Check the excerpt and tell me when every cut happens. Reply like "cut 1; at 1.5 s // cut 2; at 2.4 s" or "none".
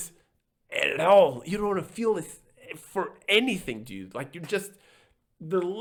none